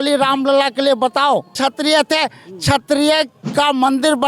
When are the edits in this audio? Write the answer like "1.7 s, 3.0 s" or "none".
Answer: 1.5 s